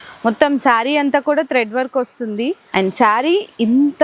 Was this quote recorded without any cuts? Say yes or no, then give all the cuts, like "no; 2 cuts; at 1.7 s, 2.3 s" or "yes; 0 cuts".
no; 1 cut; at 2.7 s